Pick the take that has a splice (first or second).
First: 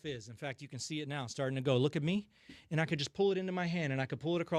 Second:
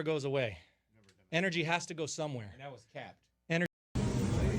second